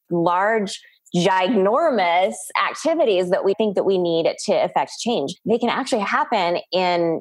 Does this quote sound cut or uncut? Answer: cut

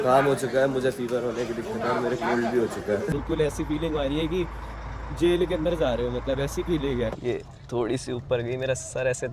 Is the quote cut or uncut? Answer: cut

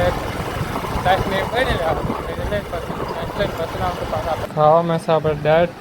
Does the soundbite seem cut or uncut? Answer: cut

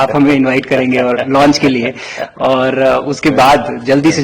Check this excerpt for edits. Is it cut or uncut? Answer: uncut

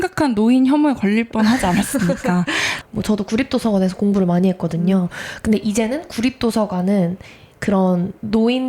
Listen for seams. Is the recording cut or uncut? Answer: cut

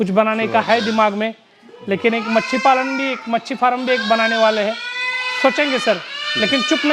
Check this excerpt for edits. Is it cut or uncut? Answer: uncut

